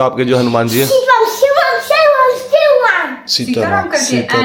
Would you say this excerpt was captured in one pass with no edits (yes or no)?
yes